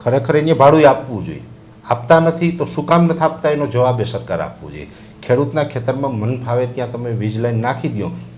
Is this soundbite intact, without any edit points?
yes; 0 cuts

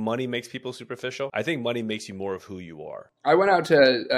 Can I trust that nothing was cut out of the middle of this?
no; 1 cut; at 3.0 s

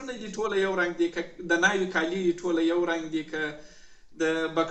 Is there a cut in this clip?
no; 0 cuts

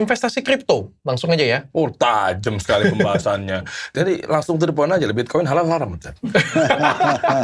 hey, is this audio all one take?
no; 1 cut; at 3.9 s

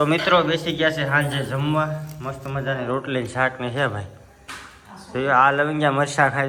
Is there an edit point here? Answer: no; 0 cuts

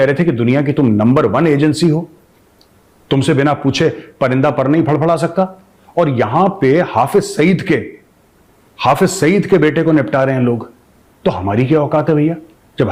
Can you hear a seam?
no; 0 cuts

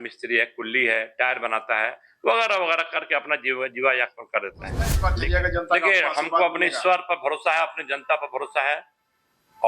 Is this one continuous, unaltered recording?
no; 1 cut; at 4.9 s

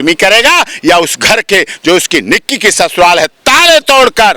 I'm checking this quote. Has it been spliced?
no; 0 cuts

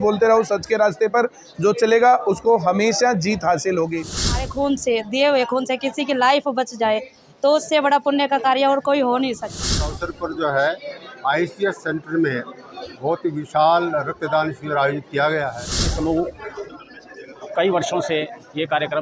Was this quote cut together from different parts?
yes; 3 cuts; at 4.4 s, 9.8 s, 15.9 s

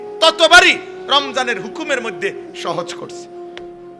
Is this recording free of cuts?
no; 1 cut; at 2.8 s

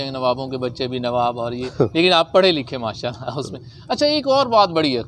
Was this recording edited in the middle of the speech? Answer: no; 0 cuts

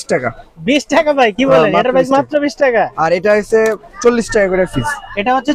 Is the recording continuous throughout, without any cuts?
yes; 0 cuts

